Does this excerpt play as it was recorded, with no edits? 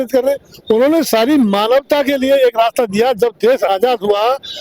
yes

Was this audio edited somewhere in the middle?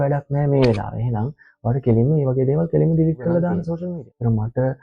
yes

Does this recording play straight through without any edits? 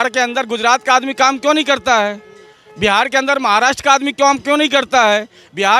yes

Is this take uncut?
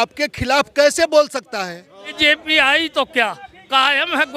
no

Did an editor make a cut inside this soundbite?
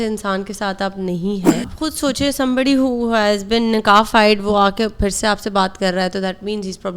yes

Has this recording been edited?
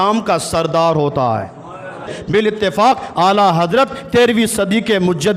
yes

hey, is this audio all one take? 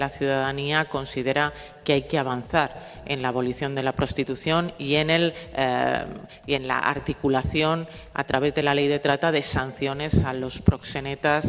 yes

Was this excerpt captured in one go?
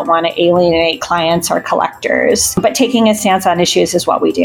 no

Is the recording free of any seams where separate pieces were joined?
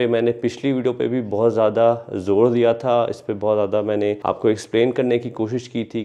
yes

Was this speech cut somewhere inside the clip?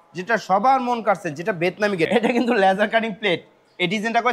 yes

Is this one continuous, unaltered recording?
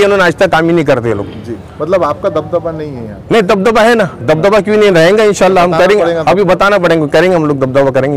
yes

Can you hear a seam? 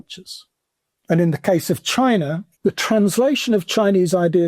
yes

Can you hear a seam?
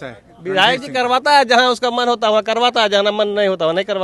no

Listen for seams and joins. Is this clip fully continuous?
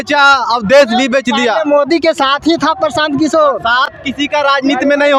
yes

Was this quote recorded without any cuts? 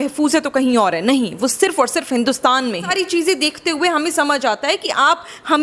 no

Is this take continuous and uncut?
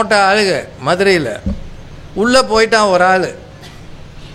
yes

